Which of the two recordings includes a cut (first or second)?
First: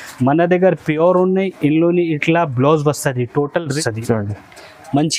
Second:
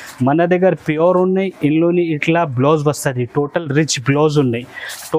first